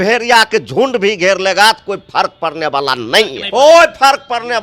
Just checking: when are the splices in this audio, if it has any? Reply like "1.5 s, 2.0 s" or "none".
3.4 s